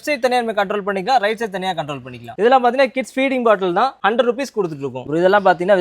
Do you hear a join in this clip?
yes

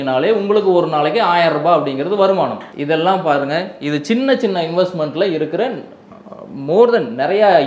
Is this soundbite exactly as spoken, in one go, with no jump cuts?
yes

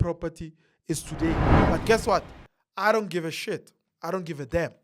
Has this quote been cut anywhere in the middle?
yes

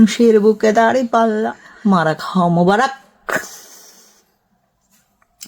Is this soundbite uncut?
no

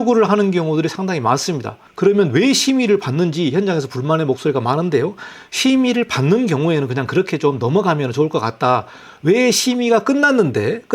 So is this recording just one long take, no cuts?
yes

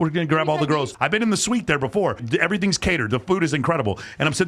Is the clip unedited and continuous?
no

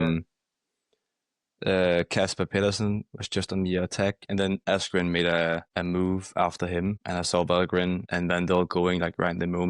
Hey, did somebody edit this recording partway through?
yes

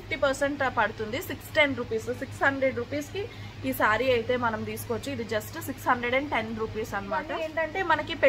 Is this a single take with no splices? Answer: no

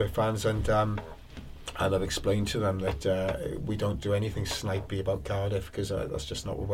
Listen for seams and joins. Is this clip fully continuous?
yes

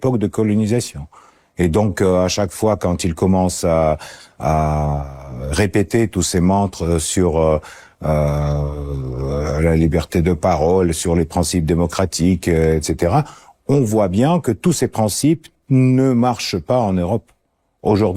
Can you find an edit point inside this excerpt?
no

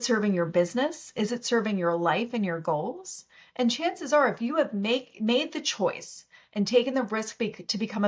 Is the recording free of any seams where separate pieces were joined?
yes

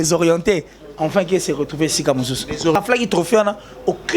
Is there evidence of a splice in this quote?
yes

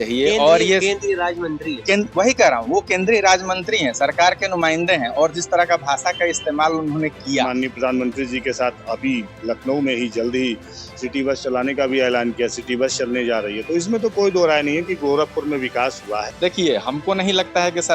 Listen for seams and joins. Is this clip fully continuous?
no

